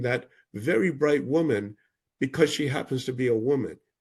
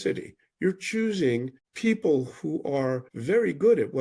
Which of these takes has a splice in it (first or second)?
second